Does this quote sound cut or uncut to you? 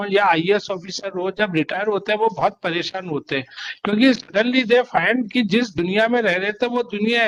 uncut